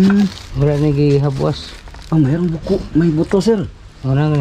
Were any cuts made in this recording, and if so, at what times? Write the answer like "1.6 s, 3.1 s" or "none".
none